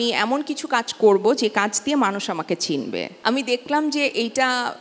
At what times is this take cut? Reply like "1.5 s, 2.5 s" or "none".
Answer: 3.1 s